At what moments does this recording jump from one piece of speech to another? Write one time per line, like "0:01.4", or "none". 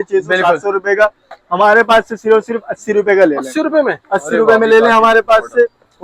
none